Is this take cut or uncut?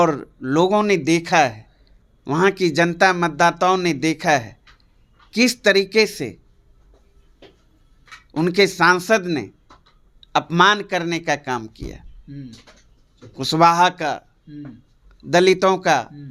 uncut